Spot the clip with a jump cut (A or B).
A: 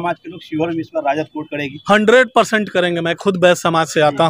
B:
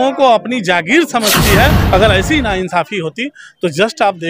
B